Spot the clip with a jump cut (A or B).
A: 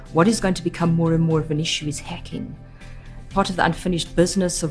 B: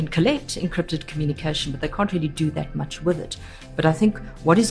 A